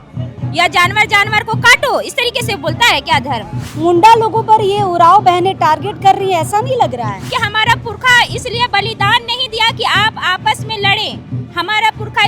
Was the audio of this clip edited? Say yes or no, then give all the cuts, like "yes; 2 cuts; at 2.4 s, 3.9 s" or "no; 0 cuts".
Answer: yes; 2 cuts; at 3.7 s, 7.3 s